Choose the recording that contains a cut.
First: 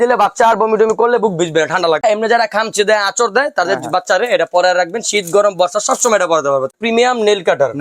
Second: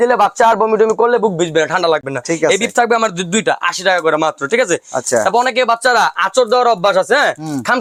first; 2 cuts; at 2.0 s, 6.7 s

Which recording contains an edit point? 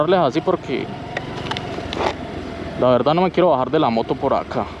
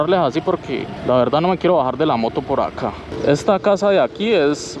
second; 2 cuts; at 0.9 s, 3.1 s

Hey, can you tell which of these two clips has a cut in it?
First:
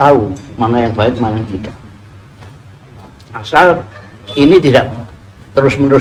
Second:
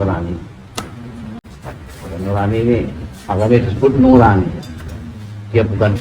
second; 1 cut; at 1.4 s

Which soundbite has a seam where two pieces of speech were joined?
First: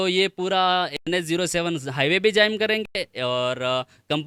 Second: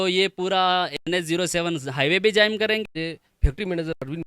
second; 1 cut; at 2.9 s

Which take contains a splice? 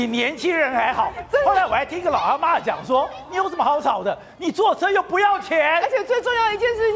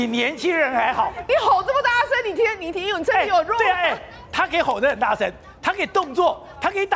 second; 1 cut; at 1.3 s

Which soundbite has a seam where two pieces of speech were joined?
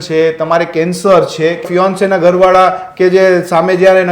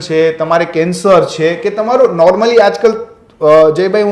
first; 1 cut; at 1.7 s

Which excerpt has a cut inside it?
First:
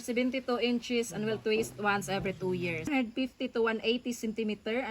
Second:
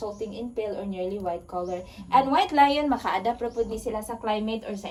first; 1 cut; at 2.9 s

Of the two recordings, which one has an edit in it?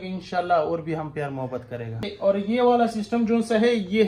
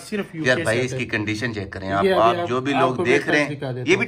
first; 1 cut; at 2.0 s

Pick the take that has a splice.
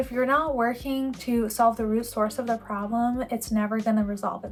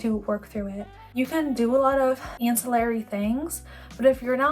second; 2 cuts; at 1.1 s, 2.3 s

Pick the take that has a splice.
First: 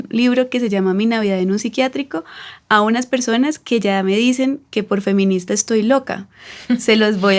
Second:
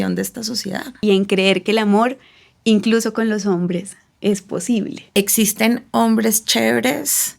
second; 2 cuts; at 0.9 s, 5.1 s

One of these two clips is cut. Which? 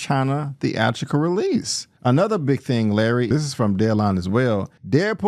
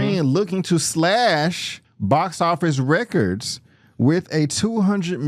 first; 1 cut; at 1.8 s

